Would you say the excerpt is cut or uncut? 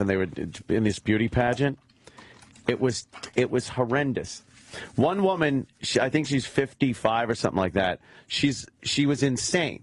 uncut